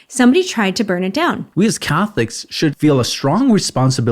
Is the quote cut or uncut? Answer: cut